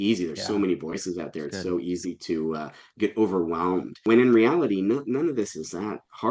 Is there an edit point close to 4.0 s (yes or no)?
yes